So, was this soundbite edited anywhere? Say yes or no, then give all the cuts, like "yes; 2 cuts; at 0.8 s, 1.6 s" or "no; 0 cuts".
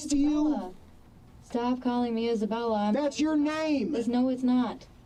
no; 0 cuts